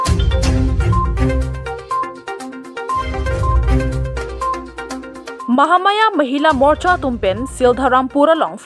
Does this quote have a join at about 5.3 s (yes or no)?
yes